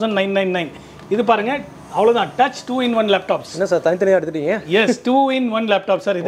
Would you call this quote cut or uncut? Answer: uncut